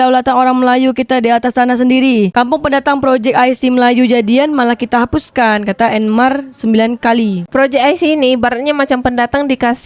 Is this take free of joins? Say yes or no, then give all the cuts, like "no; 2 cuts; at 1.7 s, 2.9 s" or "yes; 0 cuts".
no; 1 cut; at 7.5 s